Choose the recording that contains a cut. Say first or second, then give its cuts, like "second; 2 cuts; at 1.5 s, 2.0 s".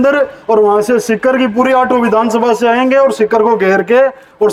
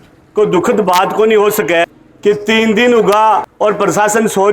second; 2 cuts; at 1.8 s, 3.5 s